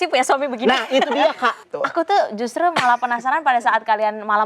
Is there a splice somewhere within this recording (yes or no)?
yes